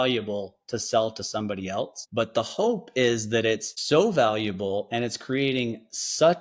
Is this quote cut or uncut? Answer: cut